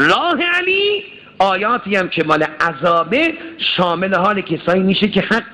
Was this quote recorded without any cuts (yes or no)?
no